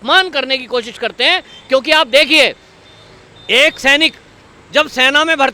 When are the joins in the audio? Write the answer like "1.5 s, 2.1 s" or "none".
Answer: none